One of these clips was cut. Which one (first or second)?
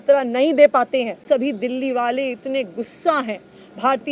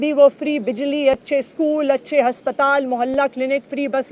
first